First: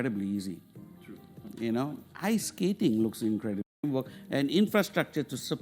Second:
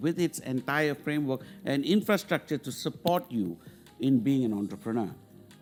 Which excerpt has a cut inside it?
first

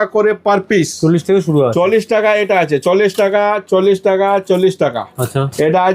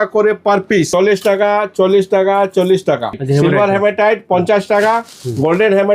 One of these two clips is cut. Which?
second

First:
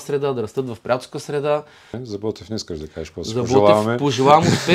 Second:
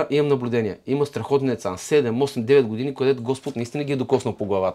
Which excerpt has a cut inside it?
first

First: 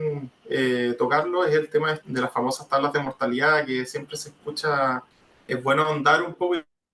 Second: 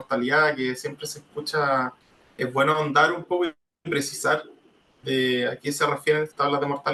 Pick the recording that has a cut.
first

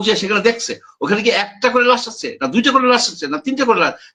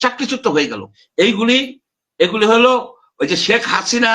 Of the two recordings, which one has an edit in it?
second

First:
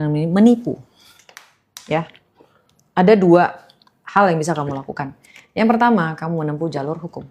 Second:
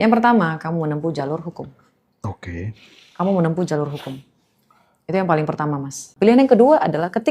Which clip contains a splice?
second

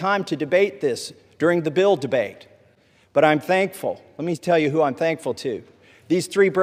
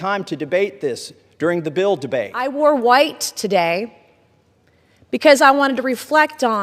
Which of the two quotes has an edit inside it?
second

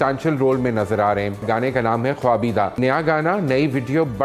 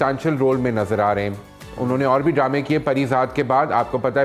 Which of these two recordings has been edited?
first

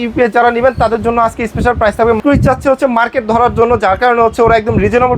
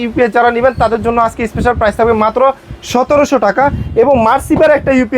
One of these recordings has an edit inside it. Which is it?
first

